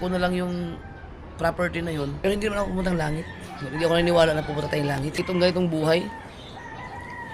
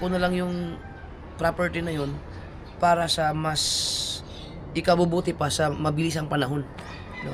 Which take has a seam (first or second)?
first